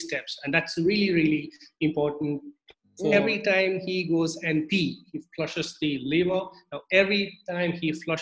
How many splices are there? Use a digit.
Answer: 1